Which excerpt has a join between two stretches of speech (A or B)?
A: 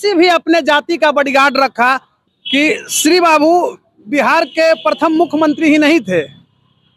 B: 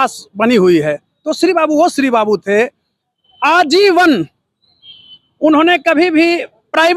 A